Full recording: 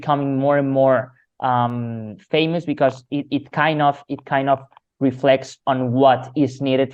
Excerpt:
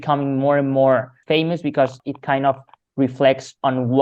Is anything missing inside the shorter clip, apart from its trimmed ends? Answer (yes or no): yes